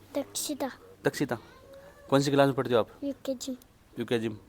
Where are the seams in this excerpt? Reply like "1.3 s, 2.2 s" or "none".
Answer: none